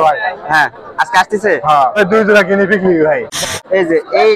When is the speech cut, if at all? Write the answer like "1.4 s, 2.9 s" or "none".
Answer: 2.0 s, 3.4 s